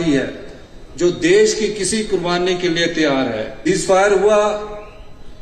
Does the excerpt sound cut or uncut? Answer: cut